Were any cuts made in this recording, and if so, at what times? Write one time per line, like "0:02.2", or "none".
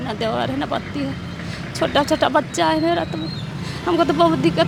none